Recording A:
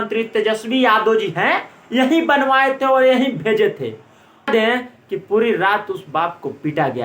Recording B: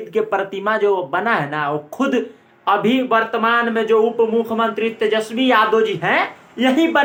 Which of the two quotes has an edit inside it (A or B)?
A